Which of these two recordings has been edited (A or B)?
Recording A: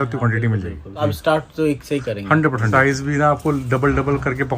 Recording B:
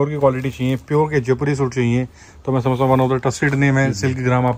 A